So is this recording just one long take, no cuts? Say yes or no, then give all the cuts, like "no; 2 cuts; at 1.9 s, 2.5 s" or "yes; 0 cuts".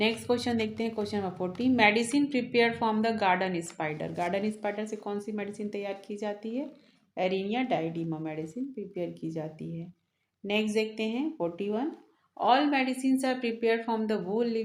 yes; 0 cuts